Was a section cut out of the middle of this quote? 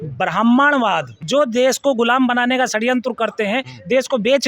yes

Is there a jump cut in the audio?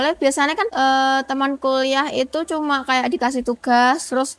no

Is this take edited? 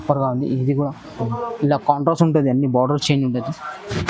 no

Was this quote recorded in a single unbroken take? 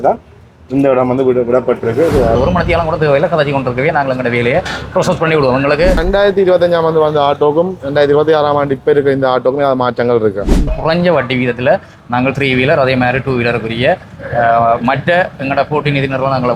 no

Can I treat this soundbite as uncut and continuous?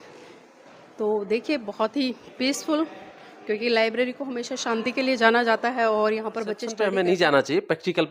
no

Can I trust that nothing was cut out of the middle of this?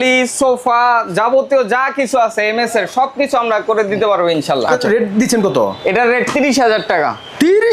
yes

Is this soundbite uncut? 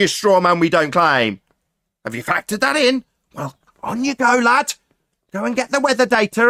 yes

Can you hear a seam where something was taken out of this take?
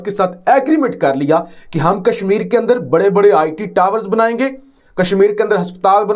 no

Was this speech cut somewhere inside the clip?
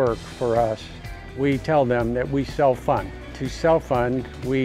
yes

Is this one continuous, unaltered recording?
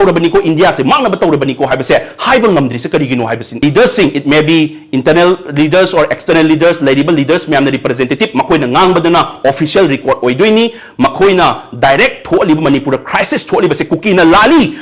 no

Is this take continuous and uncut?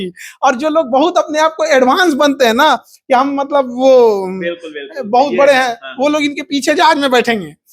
yes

